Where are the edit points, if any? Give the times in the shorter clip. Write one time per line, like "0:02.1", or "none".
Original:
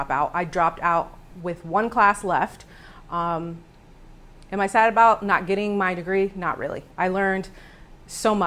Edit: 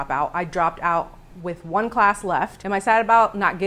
0:02.6

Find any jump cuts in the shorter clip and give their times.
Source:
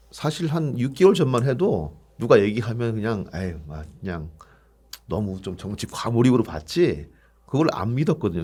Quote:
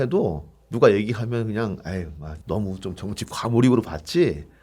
0:02.3

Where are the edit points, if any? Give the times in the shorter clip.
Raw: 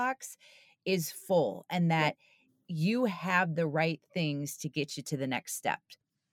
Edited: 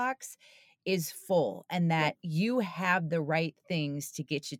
0:02.2

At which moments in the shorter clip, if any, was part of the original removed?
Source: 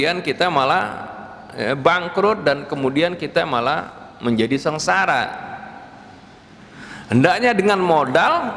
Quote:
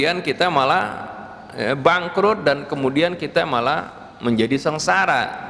none

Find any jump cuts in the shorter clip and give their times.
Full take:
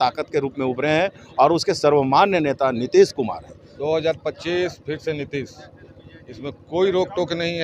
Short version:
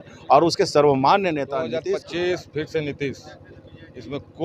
0:01.7

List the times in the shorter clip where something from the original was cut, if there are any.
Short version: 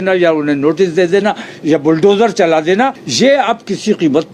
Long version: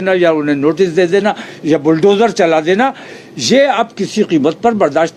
0:03.0

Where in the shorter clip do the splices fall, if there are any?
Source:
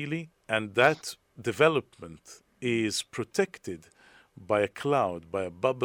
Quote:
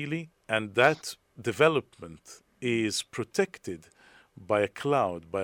none

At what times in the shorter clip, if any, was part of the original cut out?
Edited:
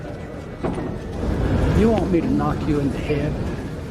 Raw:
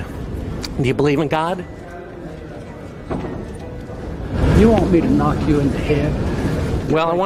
0:01.1

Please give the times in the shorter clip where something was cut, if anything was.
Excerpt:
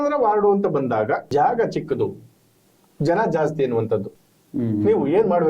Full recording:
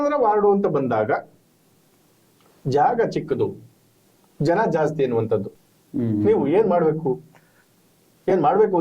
0:01.3

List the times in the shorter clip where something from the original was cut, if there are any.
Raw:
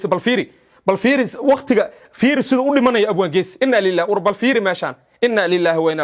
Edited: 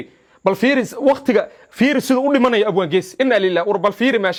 none

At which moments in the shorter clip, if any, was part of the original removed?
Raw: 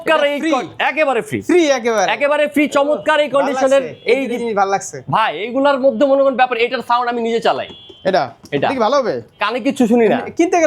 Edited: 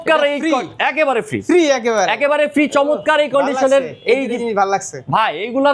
none

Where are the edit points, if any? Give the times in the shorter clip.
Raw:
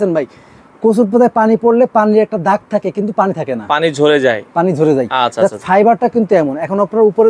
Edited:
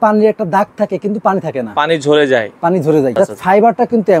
0:03.1

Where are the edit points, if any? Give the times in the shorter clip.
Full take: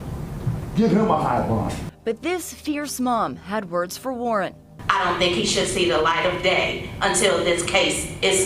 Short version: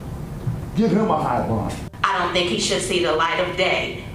0:01.8

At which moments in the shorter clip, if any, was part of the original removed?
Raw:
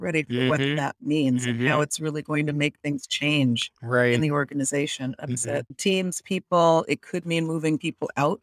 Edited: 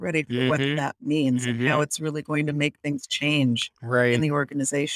none

